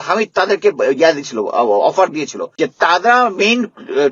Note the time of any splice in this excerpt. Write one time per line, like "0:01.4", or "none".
0:02.4